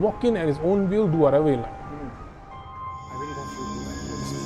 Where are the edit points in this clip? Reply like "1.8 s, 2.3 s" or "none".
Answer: 2.4 s